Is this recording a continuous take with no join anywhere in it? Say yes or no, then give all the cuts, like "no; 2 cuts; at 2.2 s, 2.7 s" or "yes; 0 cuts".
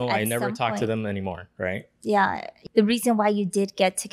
no; 1 cut; at 2.5 s